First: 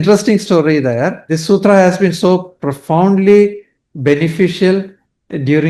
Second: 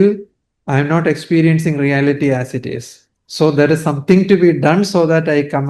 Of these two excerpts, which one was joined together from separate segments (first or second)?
first